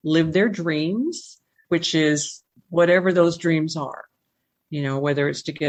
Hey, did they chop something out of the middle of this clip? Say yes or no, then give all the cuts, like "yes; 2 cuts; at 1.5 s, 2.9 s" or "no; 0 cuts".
no; 0 cuts